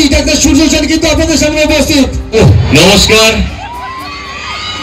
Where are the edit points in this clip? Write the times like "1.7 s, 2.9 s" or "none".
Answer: 2.4 s

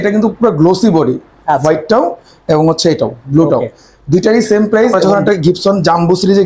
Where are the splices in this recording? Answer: 4.9 s

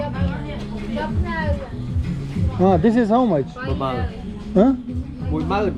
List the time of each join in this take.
none

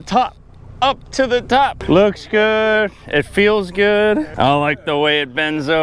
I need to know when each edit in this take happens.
1.8 s, 4.3 s

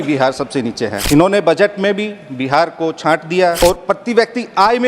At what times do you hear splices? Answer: 1.0 s, 3.6 s

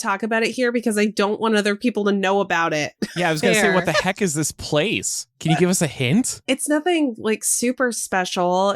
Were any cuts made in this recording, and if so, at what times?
6.4 s

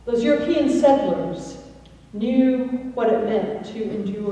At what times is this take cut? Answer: 2.0 s

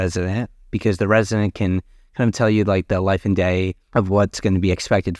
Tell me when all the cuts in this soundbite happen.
3.8 s

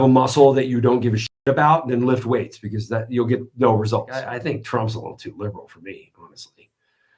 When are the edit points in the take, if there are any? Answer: 4.3 s

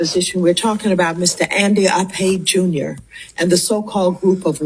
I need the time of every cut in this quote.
1.4 s

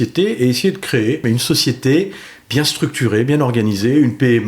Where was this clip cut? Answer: 1.2 s

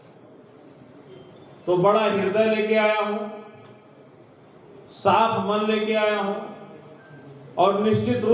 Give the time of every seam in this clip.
none

